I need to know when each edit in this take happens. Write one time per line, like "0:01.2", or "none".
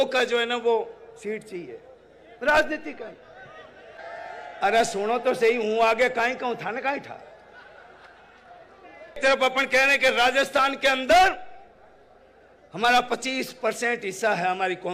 0:04.0
0:09.2